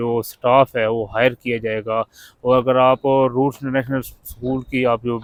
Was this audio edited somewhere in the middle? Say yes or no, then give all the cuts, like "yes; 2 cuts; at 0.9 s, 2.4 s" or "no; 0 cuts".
no; 0 cuts